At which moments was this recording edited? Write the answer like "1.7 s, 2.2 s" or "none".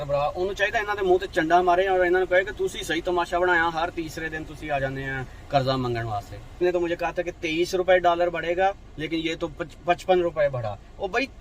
6.6 s